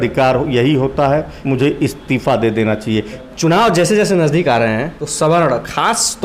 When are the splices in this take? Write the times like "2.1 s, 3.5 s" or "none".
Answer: 1.3 s, 3.2 s, 5.0 s